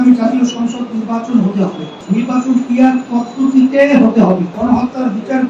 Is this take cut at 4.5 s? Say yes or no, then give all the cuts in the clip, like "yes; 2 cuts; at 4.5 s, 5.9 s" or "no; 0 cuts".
yes; 2 cuts; at 2.0 s, 4.5 s